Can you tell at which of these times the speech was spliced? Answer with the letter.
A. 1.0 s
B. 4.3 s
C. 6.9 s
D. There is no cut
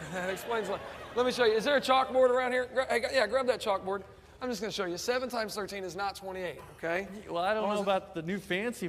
D